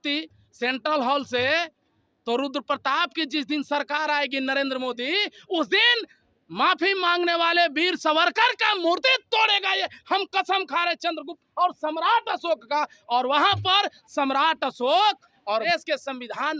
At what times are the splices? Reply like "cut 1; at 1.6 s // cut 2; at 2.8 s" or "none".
cut 1; at 15.7 s